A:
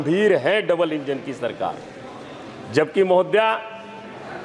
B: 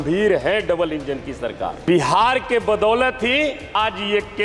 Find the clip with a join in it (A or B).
B